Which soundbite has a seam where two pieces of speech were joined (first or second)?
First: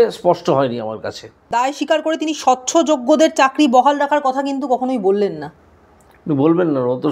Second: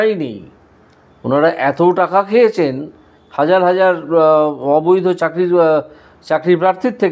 first